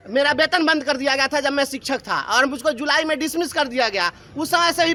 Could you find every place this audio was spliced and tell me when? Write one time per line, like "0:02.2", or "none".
none